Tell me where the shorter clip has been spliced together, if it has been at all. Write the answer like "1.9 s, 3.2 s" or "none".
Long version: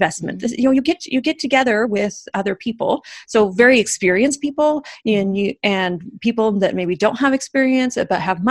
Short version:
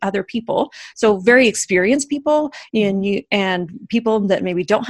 none